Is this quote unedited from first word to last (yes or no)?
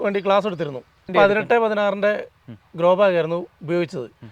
no